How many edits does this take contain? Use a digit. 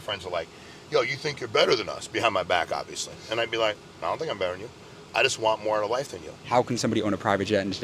1